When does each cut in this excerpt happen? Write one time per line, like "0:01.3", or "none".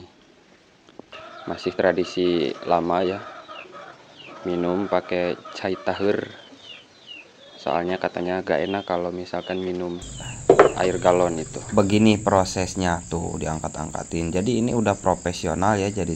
0:01.1
0:11.7

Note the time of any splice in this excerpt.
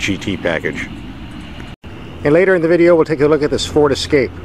0:01.8

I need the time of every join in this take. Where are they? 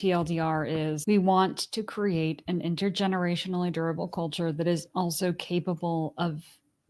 0:01.0

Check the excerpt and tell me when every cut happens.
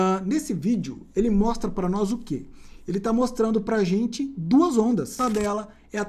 0:05.2

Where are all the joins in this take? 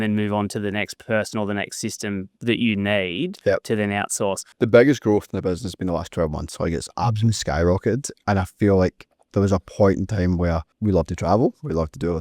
0:04.5

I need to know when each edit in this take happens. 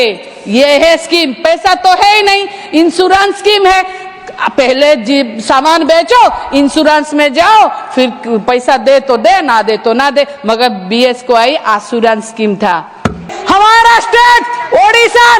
0:13.3

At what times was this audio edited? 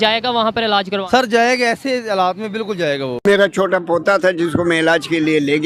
0:03.2

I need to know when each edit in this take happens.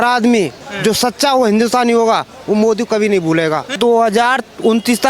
0:03.7

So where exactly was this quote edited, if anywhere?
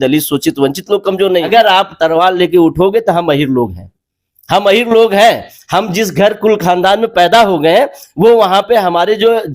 0:01.5

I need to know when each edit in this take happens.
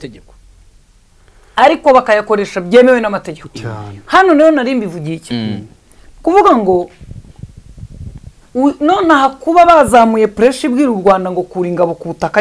none

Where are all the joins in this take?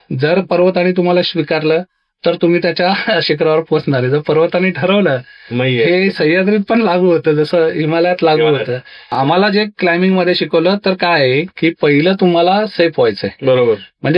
0:09.2

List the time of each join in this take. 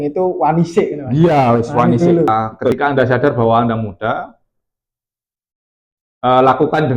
0:02.5

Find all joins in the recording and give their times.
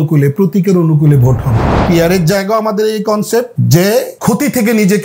0:01.7
0:03.6
0:04.1

